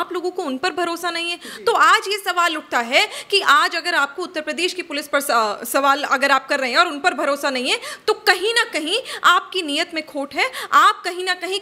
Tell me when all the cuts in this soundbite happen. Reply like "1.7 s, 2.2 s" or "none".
none